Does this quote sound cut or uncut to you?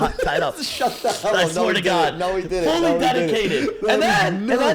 uncut